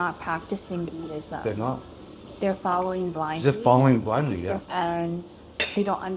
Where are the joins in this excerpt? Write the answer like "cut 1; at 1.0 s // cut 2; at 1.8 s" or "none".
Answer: cut 1; at 4.6 s